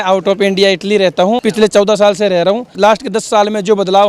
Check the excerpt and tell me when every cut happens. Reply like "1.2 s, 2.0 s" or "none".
1.4 s, 2.7 s